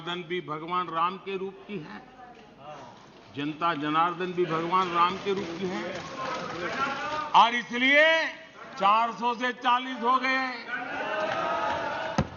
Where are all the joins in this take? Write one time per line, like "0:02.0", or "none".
none